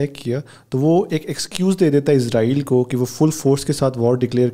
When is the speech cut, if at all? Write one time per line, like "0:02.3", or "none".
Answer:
none